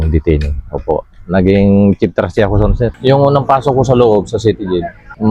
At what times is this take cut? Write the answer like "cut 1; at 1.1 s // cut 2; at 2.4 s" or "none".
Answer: cut 1; at 2.9 s